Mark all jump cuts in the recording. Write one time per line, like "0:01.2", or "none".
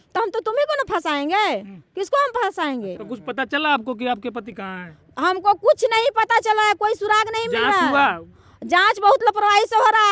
0:02.9
0:04.5